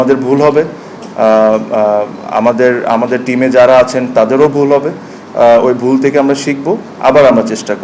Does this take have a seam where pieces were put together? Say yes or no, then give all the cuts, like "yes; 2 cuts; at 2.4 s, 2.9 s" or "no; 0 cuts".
no; 0 cuts